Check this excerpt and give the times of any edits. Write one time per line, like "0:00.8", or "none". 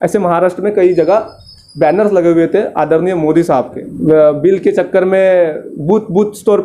0:03.9